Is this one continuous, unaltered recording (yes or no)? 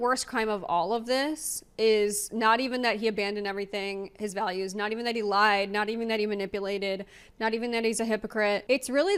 yes